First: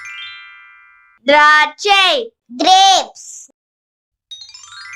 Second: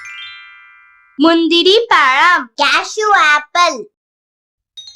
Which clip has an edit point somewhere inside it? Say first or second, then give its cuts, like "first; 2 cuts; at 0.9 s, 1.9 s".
second; 1 cut; at 1.0 s